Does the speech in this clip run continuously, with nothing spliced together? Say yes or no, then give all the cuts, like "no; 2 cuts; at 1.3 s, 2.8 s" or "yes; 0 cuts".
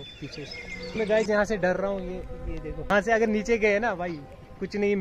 no; 2 cuts; at 0.9 s, 2.9 s